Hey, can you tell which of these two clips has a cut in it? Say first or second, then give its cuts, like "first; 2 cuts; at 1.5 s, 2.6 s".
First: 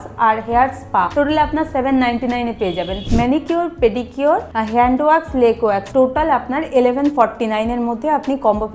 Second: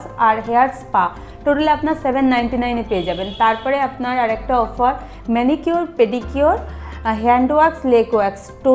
first; 4 cuts; at 1.1 s, 3.0 s, 4.5 s, 5.8 s